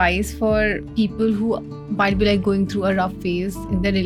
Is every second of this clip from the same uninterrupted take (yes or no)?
yes